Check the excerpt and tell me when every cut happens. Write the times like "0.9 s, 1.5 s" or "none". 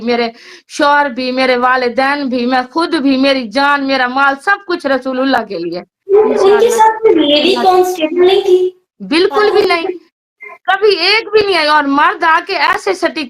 5.9 s, 8.9 s